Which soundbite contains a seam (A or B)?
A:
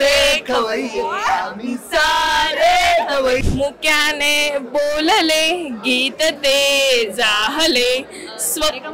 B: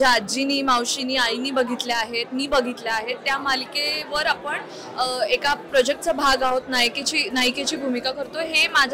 A